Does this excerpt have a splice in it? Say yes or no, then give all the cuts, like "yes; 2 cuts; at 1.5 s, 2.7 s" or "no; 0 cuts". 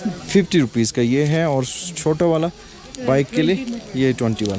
no; 0 cuts